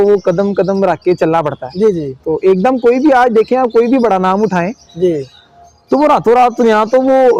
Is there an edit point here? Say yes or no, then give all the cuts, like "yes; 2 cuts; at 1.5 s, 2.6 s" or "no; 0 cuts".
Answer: no; 0 cuts